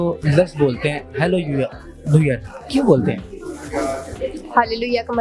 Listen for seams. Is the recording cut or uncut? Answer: uncut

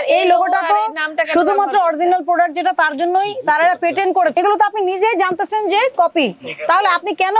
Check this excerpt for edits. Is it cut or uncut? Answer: cut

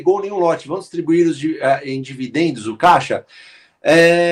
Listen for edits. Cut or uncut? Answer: uncut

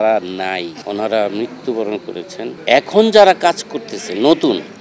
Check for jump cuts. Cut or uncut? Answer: cut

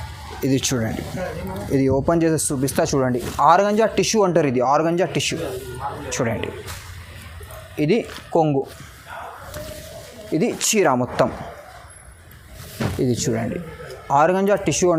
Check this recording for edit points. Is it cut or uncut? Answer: uncut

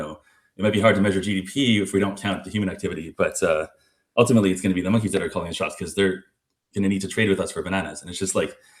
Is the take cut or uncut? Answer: uncut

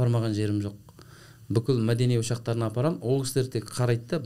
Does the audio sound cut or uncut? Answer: uncut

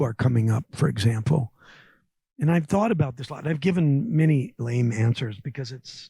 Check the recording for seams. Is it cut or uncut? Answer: uncut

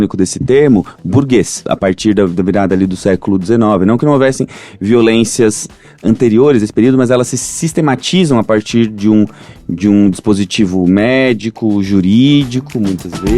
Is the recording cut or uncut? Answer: cut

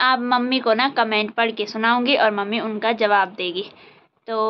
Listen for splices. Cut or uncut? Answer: uncut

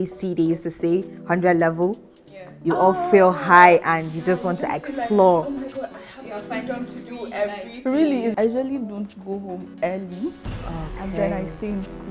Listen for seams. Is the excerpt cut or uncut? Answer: cut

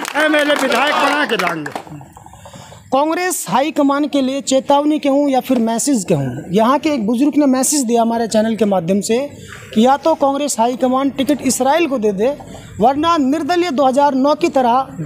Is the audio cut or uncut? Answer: uncut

